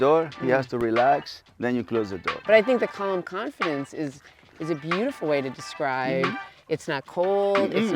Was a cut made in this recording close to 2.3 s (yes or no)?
yes